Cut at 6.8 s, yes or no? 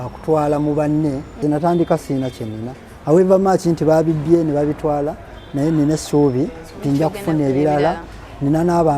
no